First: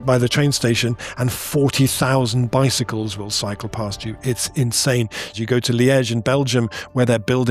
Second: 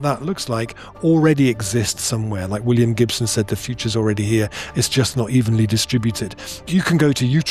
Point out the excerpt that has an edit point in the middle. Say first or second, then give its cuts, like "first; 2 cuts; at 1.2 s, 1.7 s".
first; 1 cut; at 5.3 s